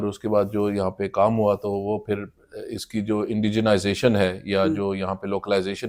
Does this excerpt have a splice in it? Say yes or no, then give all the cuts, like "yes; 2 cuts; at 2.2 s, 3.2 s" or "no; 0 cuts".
no; 0 cuts